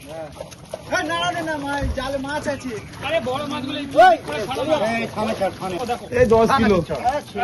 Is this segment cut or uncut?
uncut